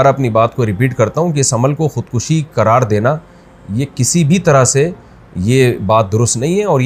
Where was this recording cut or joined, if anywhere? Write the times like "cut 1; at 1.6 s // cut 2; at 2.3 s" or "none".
none